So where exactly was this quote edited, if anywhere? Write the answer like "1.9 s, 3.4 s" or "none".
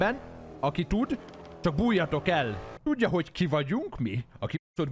2.8 s

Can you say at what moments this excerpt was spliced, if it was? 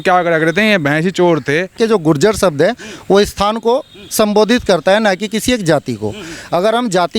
1.7 s

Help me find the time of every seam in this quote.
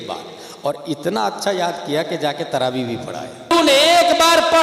3.5 s

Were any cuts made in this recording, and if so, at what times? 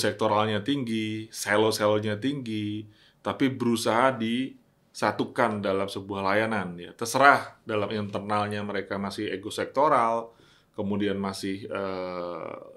none

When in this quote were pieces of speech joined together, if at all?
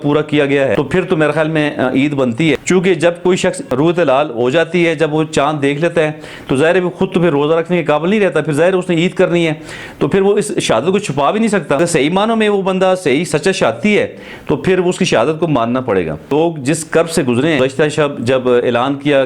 0.7 s, 2.6 s, 3.6 s, 11.8 s, 16.3 s, 17.6 s

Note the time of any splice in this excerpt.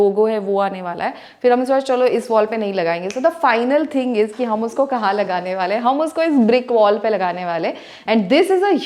none

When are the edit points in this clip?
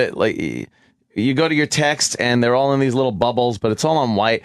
3.0 s

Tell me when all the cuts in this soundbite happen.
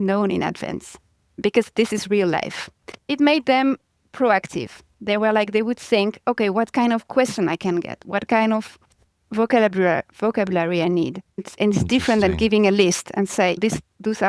3.1 s

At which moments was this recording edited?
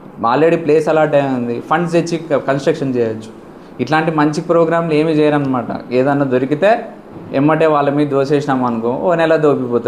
none

